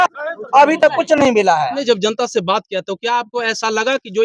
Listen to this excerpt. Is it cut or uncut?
cut